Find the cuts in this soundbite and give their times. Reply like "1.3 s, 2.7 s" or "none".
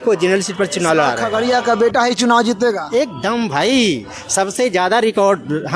1.2 s